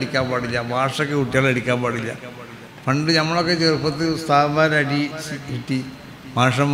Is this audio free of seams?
yes; 0 cuts

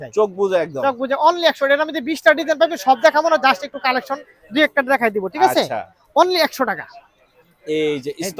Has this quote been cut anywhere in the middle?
no; 0 cuts

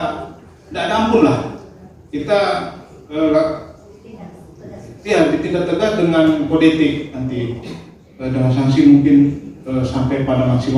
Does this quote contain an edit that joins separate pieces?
no; 0 cuts

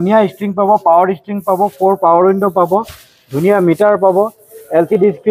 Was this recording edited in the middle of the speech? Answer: no; 0 cuts

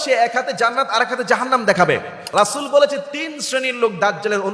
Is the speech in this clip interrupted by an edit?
yes; 1 cut; at 2.2 s

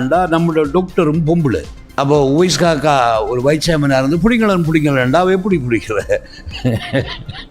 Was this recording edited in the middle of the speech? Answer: yes; 1 cut; at 1.8 s

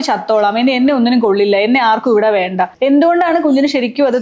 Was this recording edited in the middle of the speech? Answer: yes; 1 cut; at 2.7 s

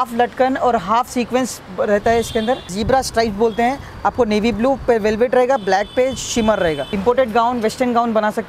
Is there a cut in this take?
yes; 2 cuts; at 2.7 s, 6.9 s

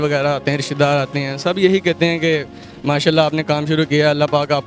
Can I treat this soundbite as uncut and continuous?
yes; 0 cuts

